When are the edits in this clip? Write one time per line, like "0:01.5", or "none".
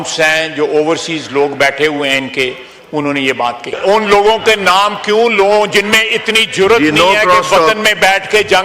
0:03.7